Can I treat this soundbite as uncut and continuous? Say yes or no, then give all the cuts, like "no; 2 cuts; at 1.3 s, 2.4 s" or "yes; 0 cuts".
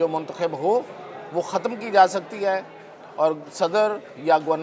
yes; 0 cuts